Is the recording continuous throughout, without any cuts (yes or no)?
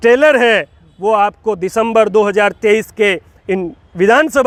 yes